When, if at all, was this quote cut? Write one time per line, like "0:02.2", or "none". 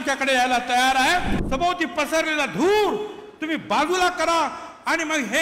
0:01.4